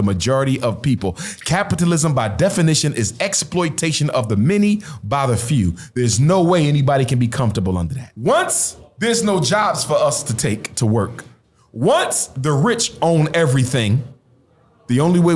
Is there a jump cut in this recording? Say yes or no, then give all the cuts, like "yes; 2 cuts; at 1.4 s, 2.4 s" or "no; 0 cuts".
yes; 1 cut; at 8.0 s